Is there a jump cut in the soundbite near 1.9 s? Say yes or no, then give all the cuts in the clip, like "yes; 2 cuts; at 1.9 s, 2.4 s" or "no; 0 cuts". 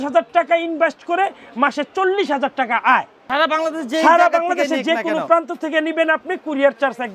no; 1 cut; at 3.2 s